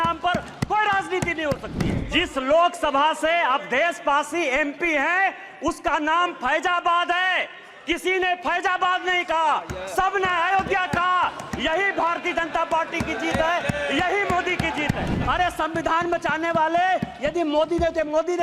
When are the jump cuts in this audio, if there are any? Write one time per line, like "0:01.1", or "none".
0:02.0
0:15.1